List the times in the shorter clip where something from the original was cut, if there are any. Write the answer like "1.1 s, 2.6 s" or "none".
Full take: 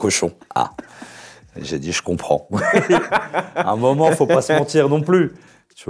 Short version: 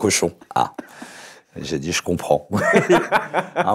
none